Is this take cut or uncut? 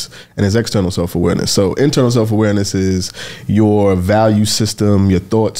uncut